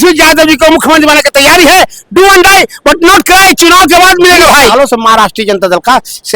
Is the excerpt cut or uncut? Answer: cut